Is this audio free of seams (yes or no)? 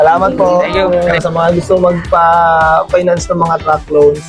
no